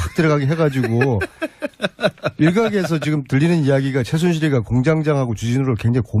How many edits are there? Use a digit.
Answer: 1